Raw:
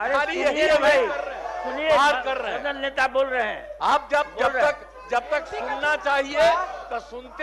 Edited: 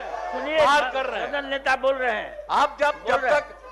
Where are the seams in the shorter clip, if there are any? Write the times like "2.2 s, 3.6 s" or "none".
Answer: none

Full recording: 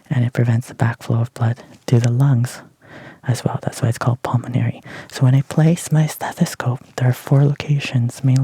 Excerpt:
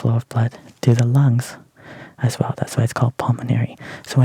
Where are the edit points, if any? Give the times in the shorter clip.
none

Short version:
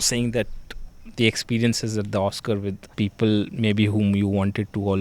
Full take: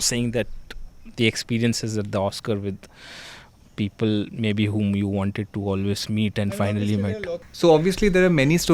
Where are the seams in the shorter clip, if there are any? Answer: 2.8 s

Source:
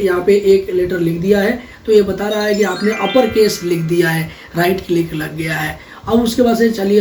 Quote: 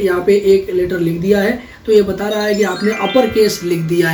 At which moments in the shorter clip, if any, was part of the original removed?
none

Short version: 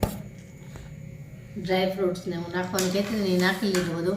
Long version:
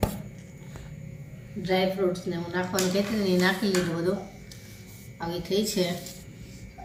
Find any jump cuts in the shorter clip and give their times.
none

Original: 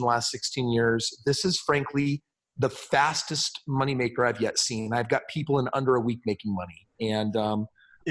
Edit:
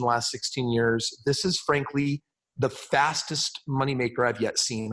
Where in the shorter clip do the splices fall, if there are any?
none

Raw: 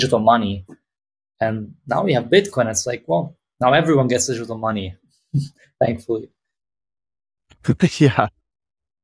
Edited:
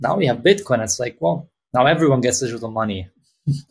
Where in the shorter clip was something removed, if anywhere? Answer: none

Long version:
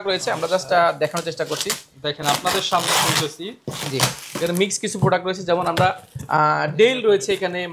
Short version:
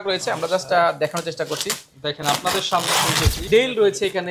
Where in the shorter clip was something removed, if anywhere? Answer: 3.4 s

